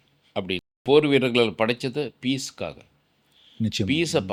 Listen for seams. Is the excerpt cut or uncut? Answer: uncut